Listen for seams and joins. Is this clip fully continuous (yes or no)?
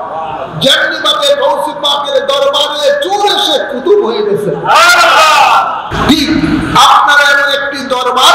no